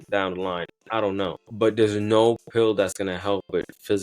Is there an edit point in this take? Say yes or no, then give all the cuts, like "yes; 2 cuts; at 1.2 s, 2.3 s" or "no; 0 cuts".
yes; 1 cut; at 1.4 s